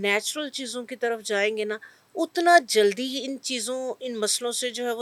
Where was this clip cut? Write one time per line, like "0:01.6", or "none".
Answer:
none